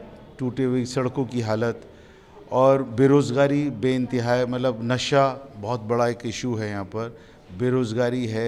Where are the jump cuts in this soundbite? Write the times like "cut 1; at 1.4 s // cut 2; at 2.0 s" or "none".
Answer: none